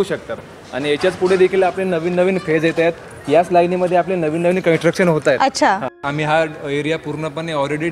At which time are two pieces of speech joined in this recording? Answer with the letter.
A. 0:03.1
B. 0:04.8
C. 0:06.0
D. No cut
C